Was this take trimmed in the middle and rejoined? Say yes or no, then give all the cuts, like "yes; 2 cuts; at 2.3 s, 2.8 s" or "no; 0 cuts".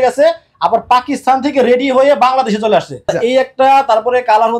yes; 1 cut; at 3.1 s